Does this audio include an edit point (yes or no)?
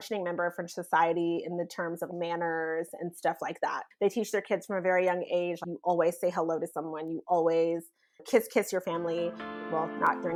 no